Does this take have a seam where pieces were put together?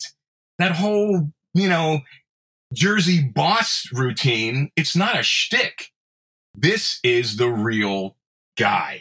no; 0 cuts

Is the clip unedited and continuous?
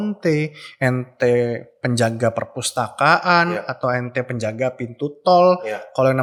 yes; 0 cuts

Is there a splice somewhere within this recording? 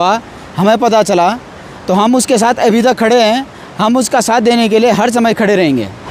no; 0 cuts

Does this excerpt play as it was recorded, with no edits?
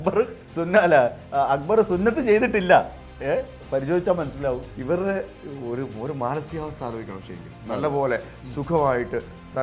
no; 1 cut; at 4.7 s

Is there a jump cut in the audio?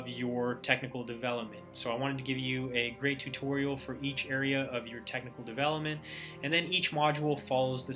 no; 0 cuts

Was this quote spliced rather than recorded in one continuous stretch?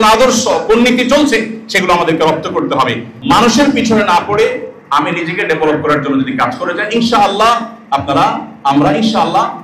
yes; 1 cut; at 3.1 s

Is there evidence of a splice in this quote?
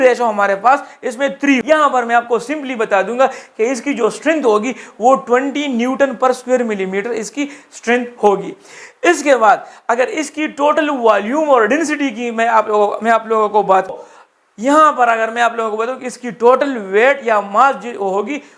yes; 2 cuts; at 1.6 s, 14.0 s

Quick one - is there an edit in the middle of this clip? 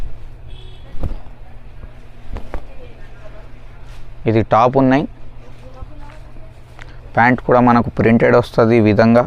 no; 0 cuts

